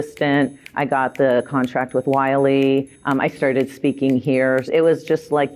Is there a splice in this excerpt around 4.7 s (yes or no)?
yes